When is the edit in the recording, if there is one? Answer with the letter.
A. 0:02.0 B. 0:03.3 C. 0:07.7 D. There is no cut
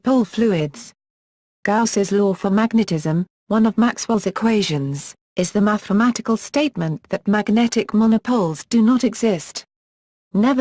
A